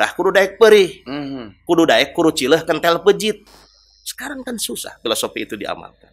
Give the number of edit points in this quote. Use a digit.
0